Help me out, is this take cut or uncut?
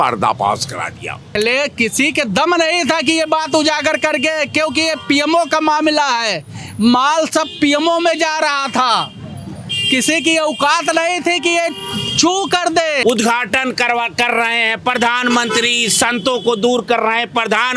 cut